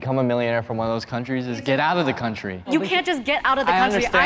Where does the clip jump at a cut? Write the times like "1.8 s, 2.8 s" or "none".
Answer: 2.7 s